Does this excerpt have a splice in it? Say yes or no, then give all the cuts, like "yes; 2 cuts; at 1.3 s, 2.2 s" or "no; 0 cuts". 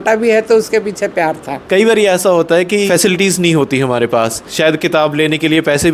yes; 3 cuts; at 1.6 s, 2.9 s, 4.4 s